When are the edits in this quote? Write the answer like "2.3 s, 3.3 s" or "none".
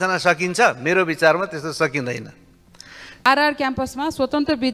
3.2 s